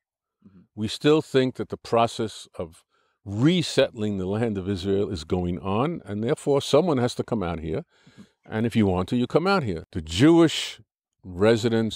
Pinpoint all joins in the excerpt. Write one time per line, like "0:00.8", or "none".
0:09.8